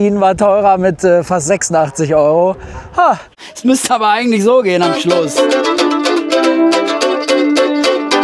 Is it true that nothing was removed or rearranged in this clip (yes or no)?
no